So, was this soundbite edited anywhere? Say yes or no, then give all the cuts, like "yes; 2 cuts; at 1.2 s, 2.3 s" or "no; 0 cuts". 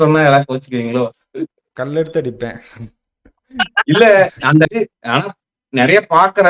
yes; 1 cut; at 4.7 s